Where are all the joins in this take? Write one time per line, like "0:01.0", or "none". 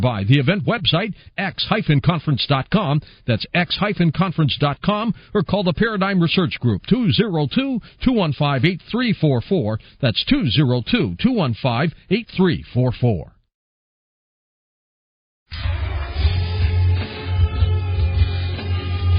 none

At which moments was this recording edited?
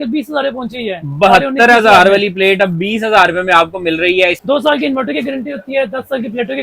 0:04.4

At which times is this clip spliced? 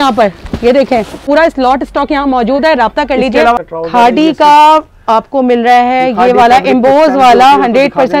0:01.2
0:03.7

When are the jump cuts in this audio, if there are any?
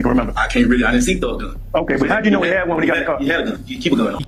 none

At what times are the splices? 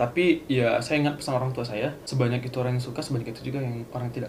0:02.0

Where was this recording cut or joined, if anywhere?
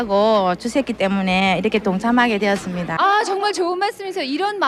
0:02.9

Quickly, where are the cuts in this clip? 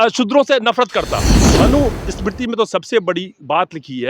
0:01.4

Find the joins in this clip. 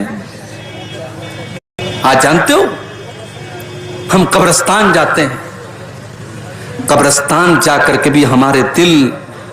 0:01.8

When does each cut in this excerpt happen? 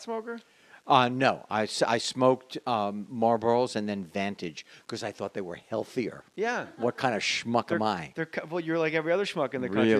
none

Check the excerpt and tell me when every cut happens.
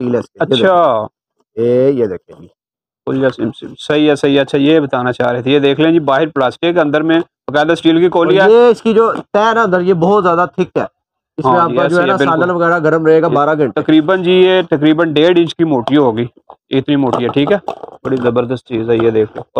none

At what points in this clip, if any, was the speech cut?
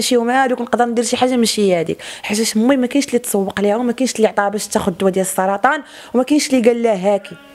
none

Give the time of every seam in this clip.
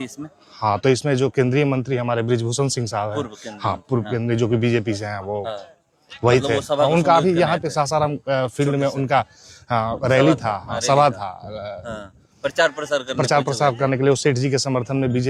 none

